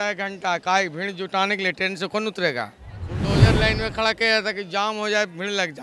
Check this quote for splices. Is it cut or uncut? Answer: cut